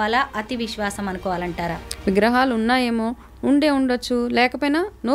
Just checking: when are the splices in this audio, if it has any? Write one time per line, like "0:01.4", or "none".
0:01.9